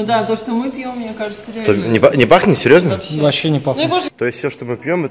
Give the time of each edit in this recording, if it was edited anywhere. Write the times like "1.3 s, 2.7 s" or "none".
4.1 s